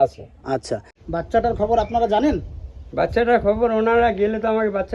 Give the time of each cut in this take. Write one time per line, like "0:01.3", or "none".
0:00.9